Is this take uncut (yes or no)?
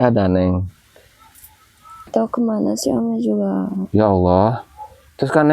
no